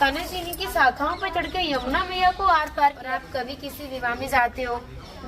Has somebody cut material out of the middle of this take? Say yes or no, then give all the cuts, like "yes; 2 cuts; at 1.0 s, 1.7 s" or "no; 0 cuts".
yes; 1 cut; at 3.1 s